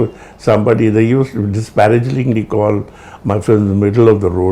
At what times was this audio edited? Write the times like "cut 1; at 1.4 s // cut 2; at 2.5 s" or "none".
none